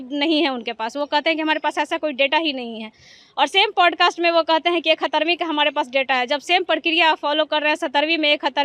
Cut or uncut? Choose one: uncut